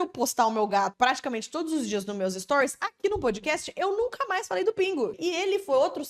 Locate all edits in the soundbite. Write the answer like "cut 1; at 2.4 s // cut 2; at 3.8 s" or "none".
cut 1; at 0.9 s // cut 2; at 5.2 s